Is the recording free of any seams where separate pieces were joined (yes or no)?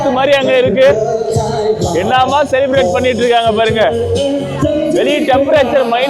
yes